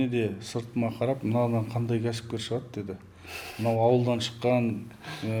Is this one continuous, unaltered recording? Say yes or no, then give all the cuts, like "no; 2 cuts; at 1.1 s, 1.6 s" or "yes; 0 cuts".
yes; 0 cuts